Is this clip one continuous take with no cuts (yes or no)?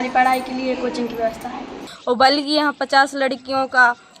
no